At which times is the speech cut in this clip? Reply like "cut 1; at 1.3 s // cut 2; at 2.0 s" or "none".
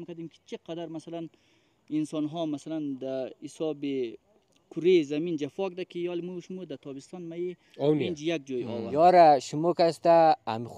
cut 1; at 8.9 s